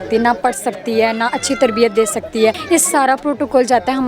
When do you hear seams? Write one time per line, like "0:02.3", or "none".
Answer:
0:02.6